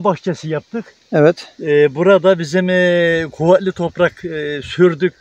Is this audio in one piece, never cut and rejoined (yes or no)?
yes